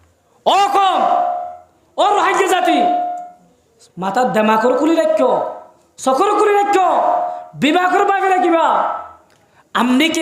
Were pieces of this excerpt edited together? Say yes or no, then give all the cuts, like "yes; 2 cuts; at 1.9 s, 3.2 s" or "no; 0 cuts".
no; 0 cuts